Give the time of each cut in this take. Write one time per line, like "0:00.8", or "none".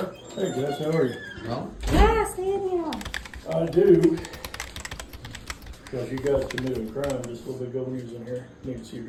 none